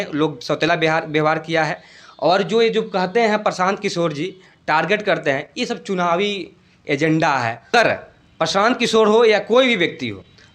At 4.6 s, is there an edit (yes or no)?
no